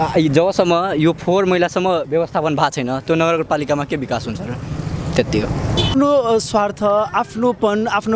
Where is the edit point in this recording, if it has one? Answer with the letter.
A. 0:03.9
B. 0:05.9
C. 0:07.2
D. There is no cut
B